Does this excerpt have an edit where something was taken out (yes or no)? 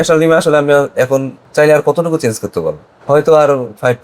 yes